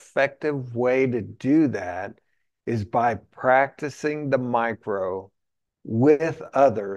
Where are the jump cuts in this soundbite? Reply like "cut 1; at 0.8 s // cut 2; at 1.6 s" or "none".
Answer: none